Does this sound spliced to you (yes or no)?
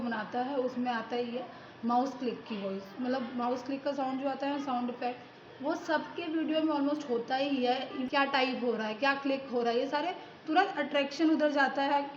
yes